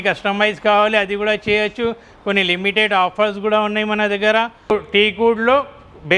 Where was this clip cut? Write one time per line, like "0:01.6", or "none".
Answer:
0:05.1